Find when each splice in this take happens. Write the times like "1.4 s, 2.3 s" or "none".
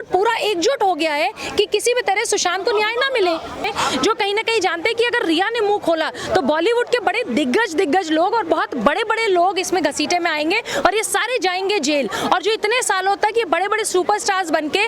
3.7 s